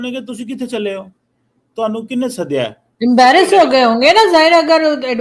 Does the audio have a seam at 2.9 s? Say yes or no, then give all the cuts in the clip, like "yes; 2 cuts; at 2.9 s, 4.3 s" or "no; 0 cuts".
yes; 1 cut; at 2.9 s